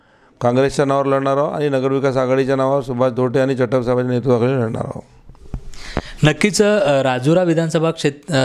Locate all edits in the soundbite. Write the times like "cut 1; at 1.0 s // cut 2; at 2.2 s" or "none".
none